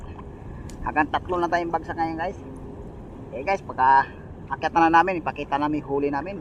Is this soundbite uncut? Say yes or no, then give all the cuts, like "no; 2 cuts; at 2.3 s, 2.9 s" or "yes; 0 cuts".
yes; 0 cuts